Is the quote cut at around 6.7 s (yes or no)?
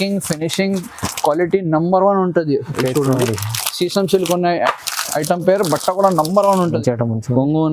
yes